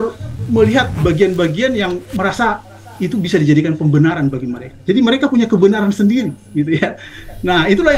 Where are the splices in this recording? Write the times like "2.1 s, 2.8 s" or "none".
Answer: none